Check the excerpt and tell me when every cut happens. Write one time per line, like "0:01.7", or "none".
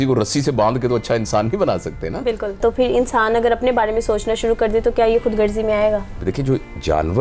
0:02.6
0:06.2